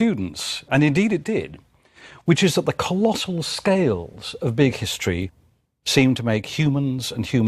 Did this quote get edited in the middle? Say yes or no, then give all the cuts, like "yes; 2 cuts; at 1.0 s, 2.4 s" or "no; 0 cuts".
yes; 1 cut; at 2.8 s